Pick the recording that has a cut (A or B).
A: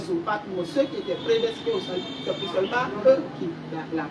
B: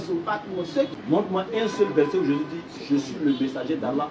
B